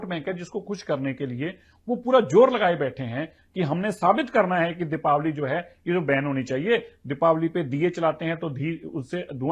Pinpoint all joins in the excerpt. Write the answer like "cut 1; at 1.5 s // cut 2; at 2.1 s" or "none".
none